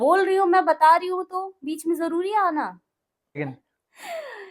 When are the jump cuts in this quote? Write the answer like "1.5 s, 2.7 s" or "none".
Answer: 3.4 s